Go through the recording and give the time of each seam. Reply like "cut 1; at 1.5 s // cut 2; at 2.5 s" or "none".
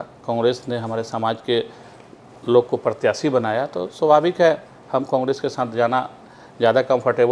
none